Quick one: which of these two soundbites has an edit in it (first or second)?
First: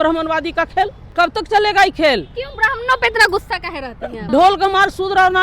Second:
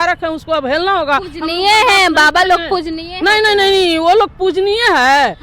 first